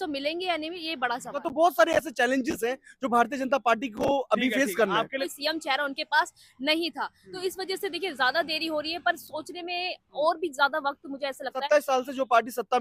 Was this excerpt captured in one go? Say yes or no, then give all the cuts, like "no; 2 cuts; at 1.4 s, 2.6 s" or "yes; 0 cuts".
no; 3 cuts; at 1.4 s, 5.2 s, 11.6 s